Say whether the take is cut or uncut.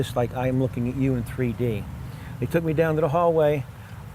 uncut